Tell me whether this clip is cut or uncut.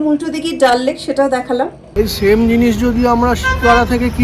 cut